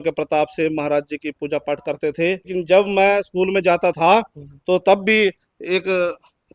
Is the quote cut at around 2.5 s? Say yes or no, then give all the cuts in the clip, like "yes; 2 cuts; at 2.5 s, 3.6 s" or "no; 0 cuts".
yes; 1 cut; at 2.5 s